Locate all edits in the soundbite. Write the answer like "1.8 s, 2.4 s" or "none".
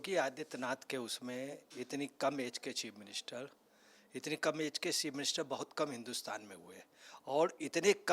none